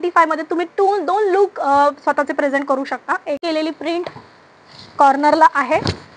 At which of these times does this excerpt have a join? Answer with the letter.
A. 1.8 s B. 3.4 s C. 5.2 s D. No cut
B